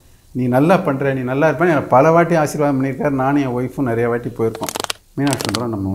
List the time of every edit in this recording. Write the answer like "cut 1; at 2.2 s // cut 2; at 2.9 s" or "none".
cut 1; at 4.7 s